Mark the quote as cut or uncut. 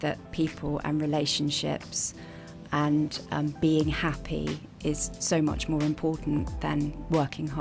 uncut